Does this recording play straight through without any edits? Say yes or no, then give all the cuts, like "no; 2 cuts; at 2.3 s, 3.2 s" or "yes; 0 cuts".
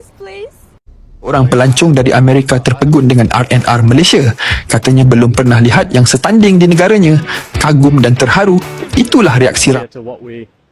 no; 2 cuts; at 1.3 s, 9.8 s